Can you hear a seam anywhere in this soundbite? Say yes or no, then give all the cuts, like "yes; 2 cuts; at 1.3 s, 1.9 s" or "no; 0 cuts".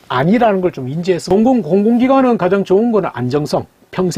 yes; 1 cut; at 1.3 s